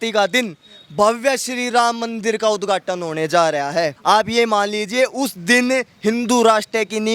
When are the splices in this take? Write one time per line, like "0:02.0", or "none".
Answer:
0:03.9